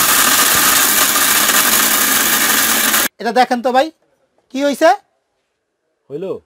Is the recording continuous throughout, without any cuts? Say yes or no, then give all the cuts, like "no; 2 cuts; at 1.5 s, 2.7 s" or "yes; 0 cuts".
no; 1 cut; at 3.1 s